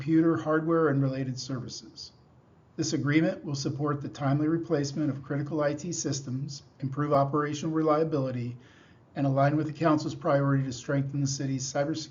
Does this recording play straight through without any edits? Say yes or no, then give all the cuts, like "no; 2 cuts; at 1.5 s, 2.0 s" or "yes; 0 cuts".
no; 1 cut; at 8.0 s